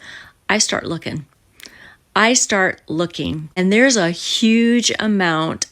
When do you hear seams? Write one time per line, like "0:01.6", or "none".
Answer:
0:03.5